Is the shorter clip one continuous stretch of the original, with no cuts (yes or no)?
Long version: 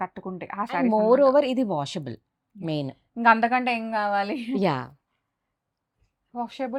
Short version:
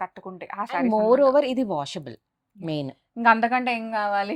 yes